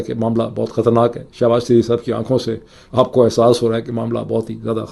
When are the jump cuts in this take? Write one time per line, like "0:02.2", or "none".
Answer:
none

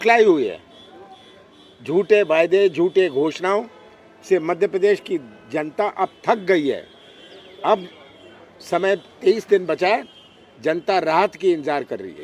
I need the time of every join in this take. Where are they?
none

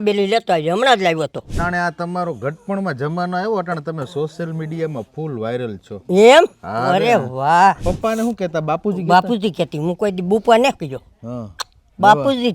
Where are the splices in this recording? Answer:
0:01.5
0:07.8

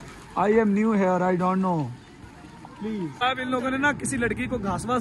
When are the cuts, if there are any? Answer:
0:03.2

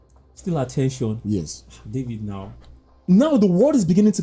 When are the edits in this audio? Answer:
0:03.0

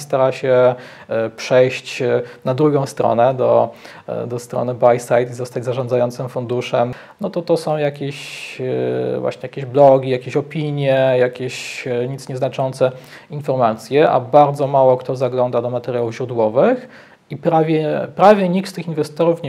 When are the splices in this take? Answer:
0:07.0

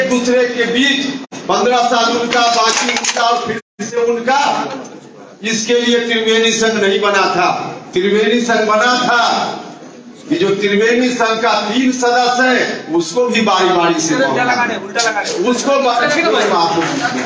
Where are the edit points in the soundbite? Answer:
none

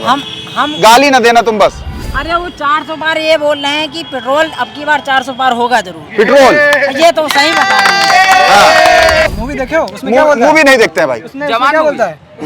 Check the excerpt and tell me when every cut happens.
0:02.0
0:09.3

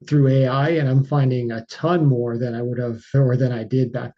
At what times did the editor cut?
0:03.1

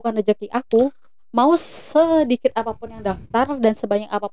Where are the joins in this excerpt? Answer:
none

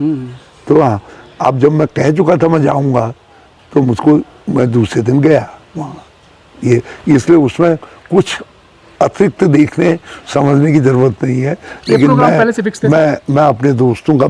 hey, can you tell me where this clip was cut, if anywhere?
none

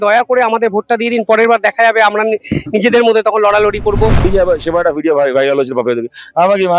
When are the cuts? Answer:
0:04.3

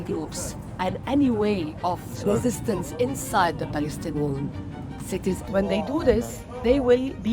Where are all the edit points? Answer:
0:02.2
0:05.4

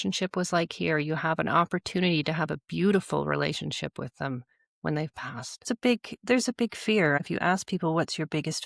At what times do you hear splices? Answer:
0:05.7
0:07.2

